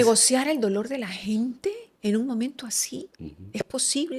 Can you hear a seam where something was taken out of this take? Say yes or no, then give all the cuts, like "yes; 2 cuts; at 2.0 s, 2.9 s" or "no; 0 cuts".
no; 0 cuts